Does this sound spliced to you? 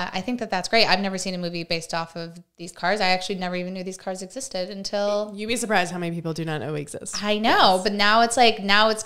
no; 0 cuts

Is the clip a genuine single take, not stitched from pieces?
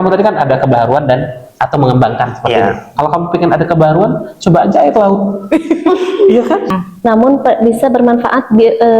no; 1 cut; at 6.7 s

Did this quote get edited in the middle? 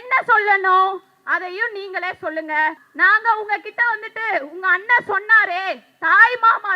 yes; 1 cut; at 2.8 s

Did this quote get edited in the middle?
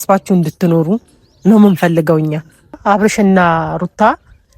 yes; 1 cut; at 2.8 s

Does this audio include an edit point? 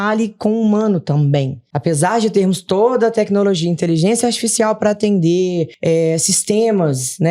yes; 2 cuts; at 1.6 s, 5.7 s

